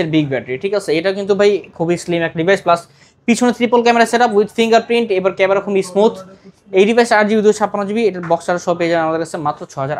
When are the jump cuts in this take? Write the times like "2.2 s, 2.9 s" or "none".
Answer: none